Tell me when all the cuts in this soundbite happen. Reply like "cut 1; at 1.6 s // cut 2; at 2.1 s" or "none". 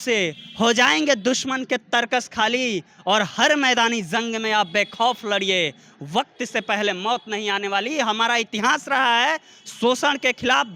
none